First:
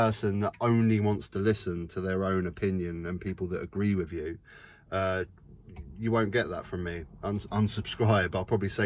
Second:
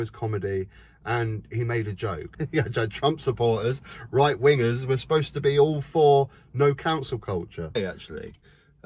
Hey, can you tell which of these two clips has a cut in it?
second; 2 cuts; at 2.2 s, 7.7 s

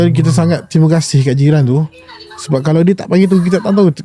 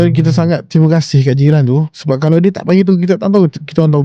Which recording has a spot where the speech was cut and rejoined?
second; 1 cut; at 1.9 s

